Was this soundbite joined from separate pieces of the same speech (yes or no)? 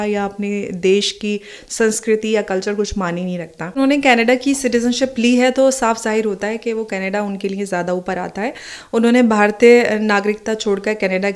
yes